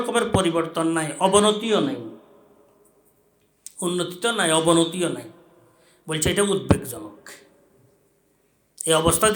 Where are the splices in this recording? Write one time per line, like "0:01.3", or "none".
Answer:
none